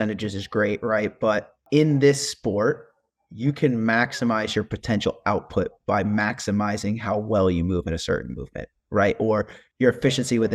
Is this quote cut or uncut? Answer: cut